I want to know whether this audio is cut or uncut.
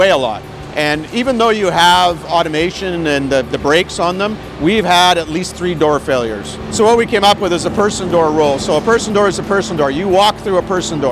cut